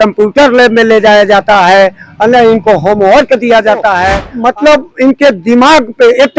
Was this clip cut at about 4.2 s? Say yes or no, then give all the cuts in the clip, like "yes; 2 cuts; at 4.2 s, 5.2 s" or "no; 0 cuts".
yes; 1 cut; at 4.2 s